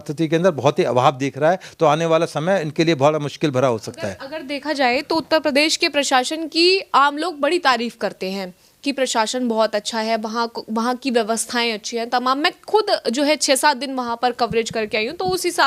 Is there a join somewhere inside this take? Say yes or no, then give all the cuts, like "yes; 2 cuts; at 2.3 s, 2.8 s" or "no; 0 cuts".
no; 0 cuts